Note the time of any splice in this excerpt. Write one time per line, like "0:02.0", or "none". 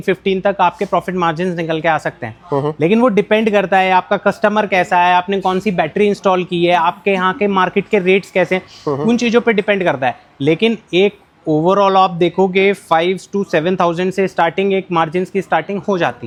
none